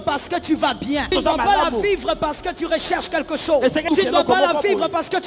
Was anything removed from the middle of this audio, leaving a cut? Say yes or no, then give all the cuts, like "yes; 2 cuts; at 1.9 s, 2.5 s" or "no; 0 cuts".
yes; 2 cuts; at 1.1 s, 3.9 s